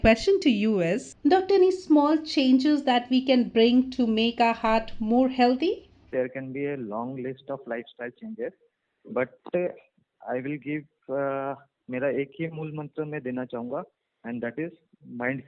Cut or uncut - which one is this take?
cut